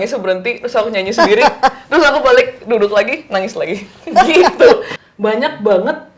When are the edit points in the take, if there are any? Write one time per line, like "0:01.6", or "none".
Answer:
0:04.9